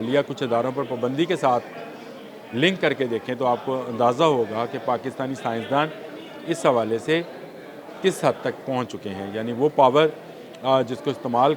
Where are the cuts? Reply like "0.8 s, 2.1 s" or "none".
none